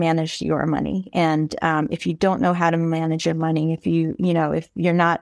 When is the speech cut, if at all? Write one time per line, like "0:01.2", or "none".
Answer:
none